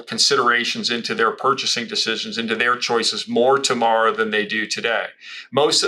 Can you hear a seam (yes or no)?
no